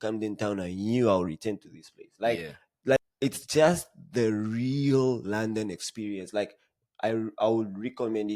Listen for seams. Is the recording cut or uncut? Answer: cut